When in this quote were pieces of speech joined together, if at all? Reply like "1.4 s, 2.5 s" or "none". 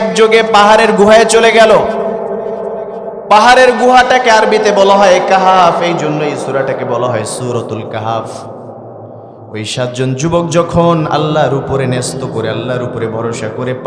none